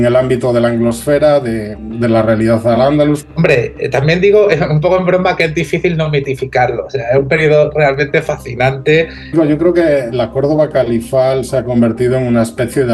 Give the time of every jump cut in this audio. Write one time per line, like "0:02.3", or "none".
0:03.3
0:09.3